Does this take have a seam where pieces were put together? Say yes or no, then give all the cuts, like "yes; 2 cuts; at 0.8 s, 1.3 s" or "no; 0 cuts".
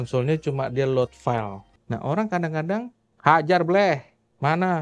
yes; 1 cut; at 1.6 s